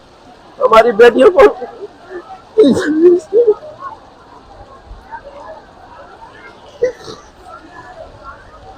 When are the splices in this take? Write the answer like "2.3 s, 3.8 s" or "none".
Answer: none